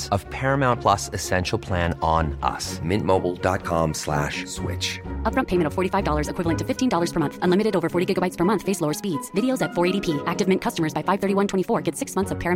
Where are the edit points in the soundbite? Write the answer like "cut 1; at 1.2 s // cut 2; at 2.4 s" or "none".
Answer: none